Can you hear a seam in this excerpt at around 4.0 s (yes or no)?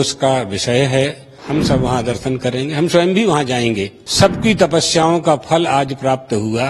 yes